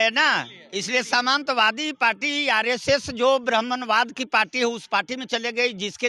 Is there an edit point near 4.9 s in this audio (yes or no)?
no